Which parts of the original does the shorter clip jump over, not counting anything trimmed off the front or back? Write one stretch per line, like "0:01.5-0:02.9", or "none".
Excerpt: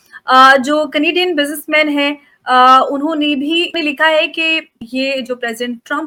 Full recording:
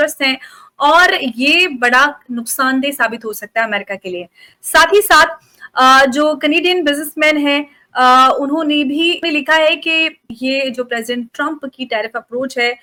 none